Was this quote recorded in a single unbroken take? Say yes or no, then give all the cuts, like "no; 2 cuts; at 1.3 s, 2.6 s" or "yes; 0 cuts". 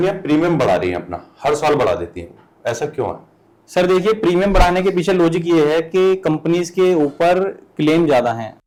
yes; 0 cuts